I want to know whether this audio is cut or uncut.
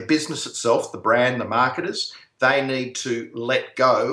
uncut